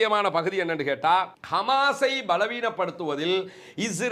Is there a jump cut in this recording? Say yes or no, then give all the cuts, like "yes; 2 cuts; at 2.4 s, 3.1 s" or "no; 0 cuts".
no; 0 cuts